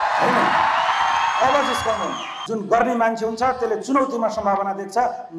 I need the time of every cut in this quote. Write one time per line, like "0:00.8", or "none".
0:02.4